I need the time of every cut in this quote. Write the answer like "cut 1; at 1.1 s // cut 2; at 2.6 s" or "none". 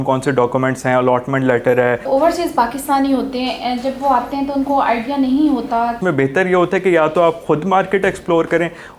cut 1; at 2.0 s // cut 2; at 6.0 s